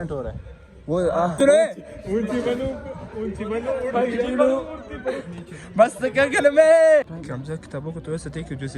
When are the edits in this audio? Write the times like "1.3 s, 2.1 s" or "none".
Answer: 1.3 s, 7.2 s